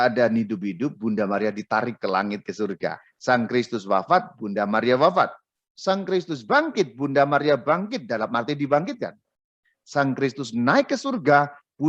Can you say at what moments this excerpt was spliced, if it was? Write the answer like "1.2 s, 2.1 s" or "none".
3.1 s